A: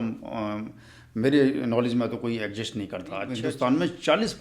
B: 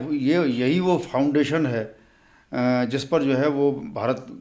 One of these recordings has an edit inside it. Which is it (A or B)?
A